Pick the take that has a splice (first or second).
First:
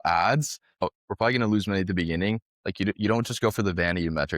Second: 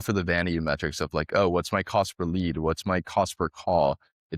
first